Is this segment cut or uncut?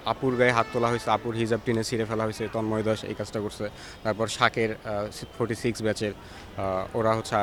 uncut